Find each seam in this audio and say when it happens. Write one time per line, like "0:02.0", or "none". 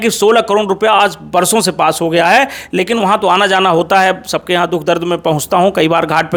none

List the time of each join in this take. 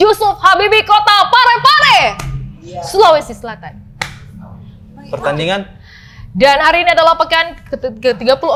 none

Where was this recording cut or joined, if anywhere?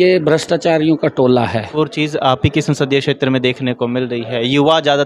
0:01.8

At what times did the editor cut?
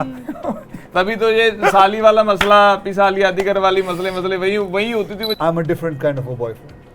0:05.4

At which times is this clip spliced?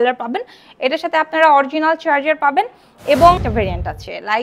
0:03.4

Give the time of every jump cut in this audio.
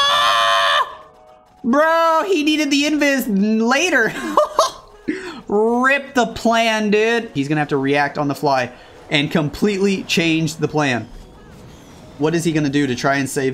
0:07.3

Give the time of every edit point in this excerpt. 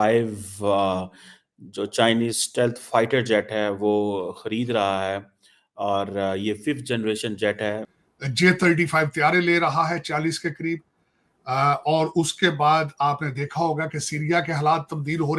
0:07.9

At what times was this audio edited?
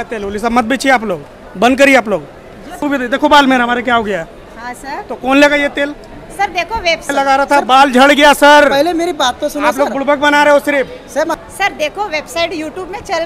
0:02.8
0:07.1
0:11.4

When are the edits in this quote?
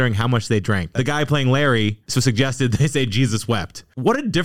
0:00.9
0:02.0

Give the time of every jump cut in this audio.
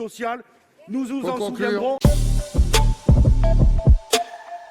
0:02.0

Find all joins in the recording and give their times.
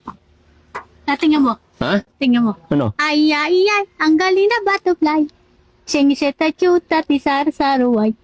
none

